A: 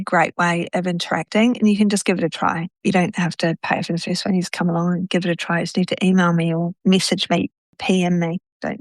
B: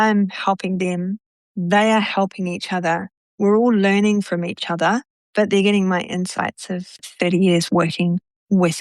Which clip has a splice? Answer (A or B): A